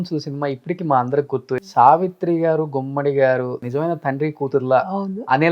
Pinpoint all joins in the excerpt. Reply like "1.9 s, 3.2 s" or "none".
1.7 s